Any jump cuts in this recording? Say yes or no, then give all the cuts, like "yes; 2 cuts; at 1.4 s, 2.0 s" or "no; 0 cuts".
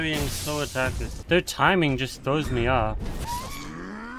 yes; 2 cuts; at 1.1 s, 3.2 s